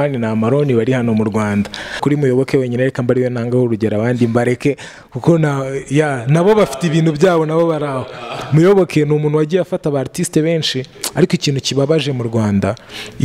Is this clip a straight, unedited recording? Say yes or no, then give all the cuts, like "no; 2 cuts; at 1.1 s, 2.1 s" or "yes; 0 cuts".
no; 1 cut; at 2.0 s